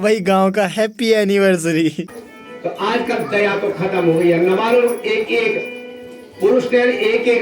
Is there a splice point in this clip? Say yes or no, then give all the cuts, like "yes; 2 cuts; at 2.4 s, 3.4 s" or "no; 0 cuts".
yes; 1 cut; at 2.0 s